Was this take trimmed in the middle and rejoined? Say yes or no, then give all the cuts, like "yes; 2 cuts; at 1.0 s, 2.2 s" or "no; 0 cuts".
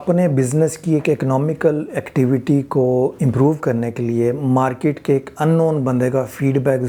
no; 0 cuts